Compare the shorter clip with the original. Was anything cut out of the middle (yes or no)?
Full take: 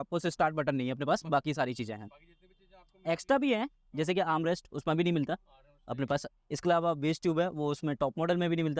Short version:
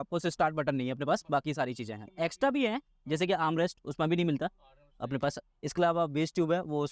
yes